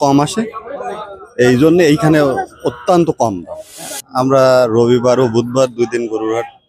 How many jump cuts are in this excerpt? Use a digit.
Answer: 1